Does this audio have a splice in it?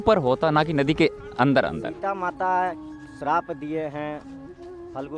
yes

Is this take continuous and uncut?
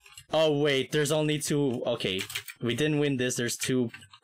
yes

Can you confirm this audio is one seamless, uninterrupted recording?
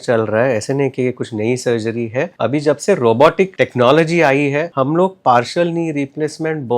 no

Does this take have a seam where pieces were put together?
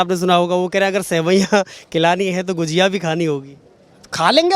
no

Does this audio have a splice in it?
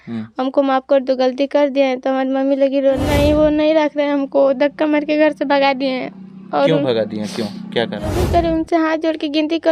yes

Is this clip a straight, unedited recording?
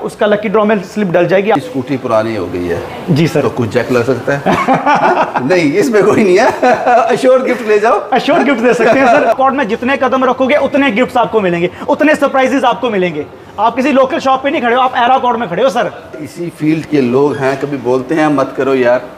no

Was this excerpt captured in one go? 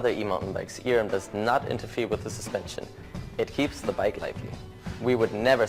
yes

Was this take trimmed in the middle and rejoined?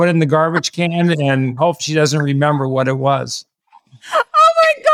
no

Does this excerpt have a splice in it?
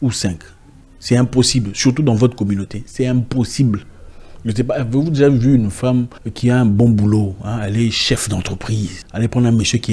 yes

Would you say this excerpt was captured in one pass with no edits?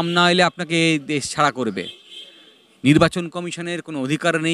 yes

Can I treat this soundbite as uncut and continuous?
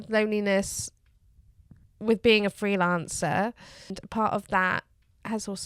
no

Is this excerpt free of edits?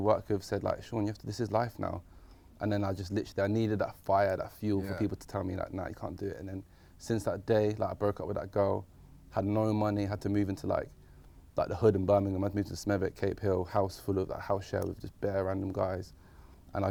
yes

